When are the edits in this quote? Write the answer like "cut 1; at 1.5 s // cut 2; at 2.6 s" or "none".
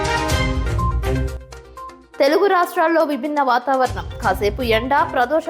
cut 1; at 2.0 s